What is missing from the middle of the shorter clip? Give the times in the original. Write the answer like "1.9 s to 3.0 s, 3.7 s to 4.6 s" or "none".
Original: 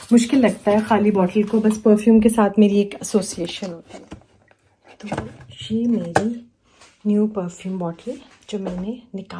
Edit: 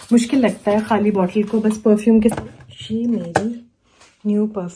2.3 s to 5.1 s

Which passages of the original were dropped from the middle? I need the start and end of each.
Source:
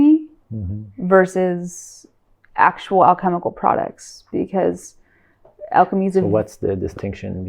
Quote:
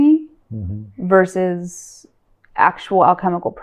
none

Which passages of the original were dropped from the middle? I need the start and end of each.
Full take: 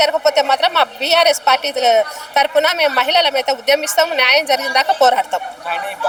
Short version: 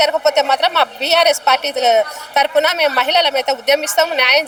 none

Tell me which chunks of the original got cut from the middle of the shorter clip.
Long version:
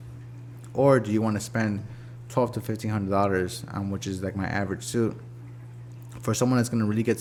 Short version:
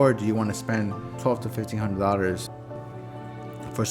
1.9 s to 2.2 s, 3.8 s to 5.2 s

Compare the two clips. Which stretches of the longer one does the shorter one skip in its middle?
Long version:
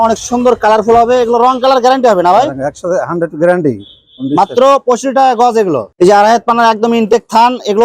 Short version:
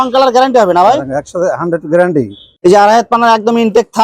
4.0 s to 5.9 s

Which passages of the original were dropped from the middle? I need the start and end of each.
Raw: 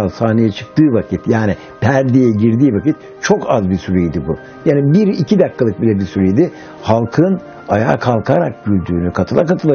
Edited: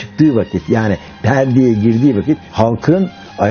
3.0 s to 6.8 s

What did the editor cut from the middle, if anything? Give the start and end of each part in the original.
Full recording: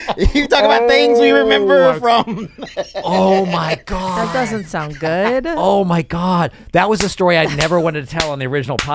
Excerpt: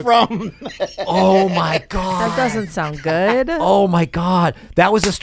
none

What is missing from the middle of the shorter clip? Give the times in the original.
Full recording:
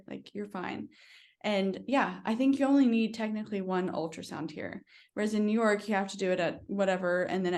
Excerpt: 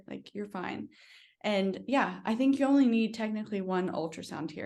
none

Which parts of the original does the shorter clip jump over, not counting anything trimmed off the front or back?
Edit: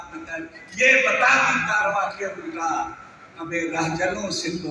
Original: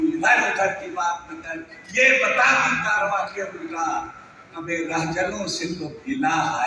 none

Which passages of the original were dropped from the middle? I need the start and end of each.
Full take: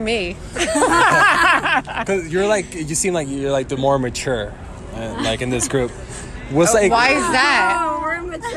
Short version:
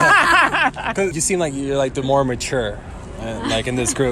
2.3 s to 2.9 s

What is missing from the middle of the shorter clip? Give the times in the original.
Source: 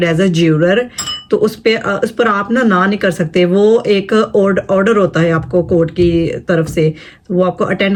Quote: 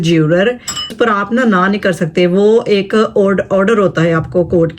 1.2 s to 2.1 s

